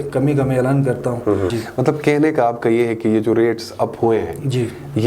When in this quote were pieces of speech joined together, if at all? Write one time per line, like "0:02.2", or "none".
0:01.5